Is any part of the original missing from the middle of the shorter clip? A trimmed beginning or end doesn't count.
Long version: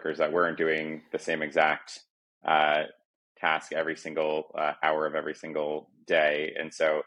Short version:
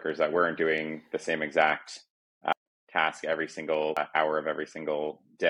yes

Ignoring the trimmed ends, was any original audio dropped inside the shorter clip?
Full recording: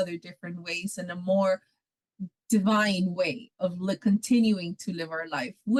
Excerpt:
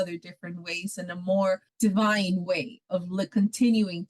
yes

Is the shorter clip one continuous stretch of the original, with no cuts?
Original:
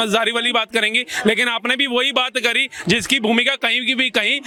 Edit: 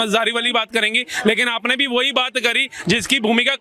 yes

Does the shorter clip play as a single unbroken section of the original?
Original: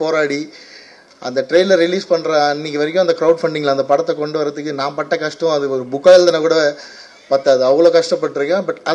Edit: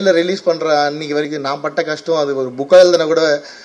no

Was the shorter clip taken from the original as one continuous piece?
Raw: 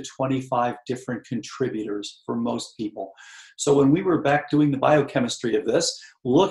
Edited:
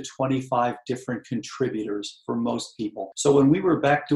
no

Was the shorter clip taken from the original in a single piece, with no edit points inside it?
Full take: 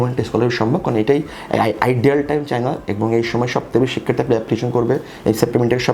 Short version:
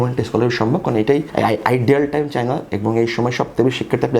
no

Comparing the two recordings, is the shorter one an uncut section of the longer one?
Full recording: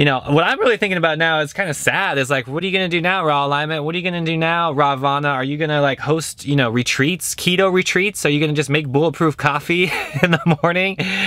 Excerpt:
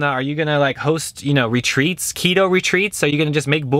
yes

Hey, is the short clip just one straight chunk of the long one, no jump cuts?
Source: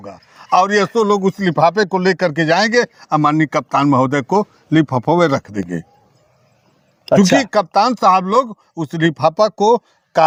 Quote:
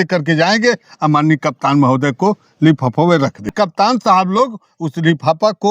no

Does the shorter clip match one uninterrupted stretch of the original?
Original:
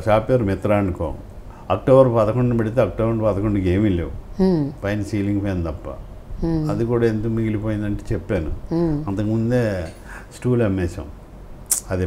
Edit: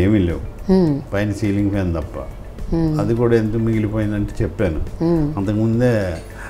yes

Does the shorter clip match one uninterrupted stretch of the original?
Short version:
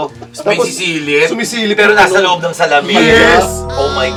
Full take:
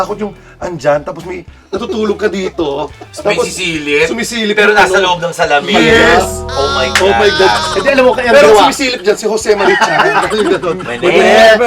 yes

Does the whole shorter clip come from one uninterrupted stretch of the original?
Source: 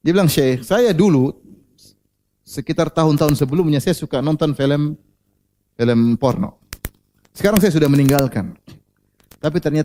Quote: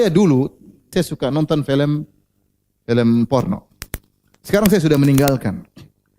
no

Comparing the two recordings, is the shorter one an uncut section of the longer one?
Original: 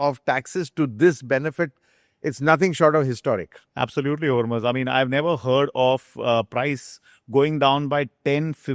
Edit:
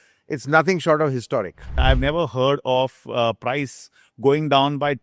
no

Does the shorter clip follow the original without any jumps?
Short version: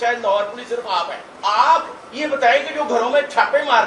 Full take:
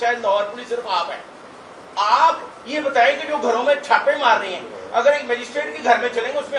no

